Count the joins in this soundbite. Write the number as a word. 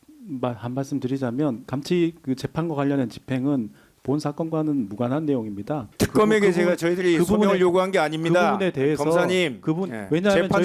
two